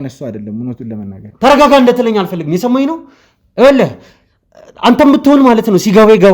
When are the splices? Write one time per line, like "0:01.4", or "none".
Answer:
0:01.2